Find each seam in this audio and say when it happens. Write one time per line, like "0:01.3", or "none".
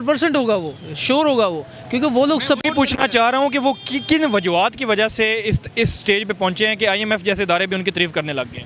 none